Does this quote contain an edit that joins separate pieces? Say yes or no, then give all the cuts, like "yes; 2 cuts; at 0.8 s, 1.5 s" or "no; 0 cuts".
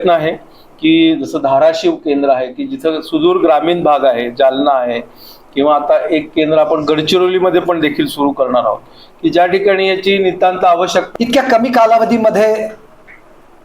yes; 1 cut; at 11.1 s